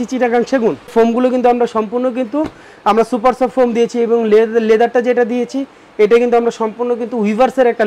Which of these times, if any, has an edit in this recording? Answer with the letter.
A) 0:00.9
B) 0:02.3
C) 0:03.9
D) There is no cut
A